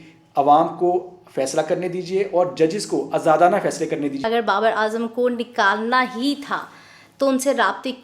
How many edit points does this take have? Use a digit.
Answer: 1